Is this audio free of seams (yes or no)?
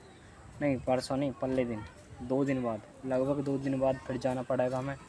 yes